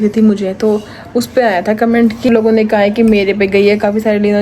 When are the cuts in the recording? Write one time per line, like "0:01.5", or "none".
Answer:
0:02.3